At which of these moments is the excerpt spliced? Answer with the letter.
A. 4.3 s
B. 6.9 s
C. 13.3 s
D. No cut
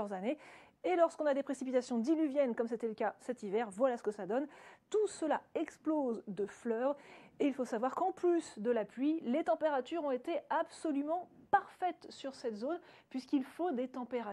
A